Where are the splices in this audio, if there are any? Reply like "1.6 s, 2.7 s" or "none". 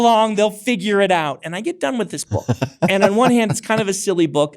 2.9 s